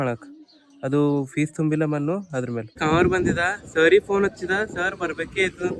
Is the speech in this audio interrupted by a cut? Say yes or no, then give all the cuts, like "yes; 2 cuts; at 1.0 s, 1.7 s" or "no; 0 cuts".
yes; 1 cut; at 2.8 s